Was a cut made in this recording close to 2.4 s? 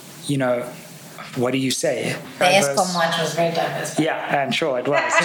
yes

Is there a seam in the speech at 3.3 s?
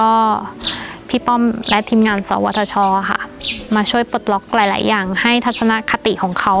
no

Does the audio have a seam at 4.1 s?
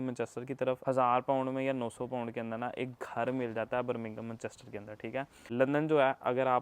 no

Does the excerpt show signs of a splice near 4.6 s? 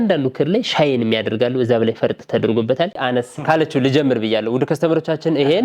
no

